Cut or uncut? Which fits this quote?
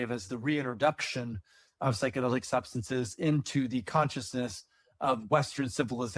uncut